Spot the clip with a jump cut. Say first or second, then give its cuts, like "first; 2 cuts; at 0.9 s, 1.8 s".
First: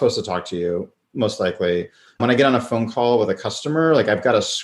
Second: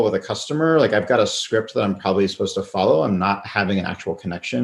first; 2 cuts; at 1.0 s, 2.2 s